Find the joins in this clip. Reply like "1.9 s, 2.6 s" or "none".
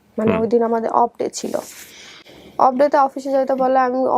none